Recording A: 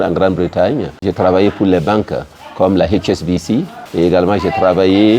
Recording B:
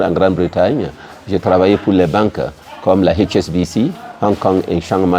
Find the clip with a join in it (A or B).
A